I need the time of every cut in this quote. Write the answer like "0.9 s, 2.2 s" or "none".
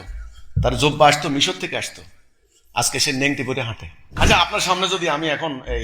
4.1 s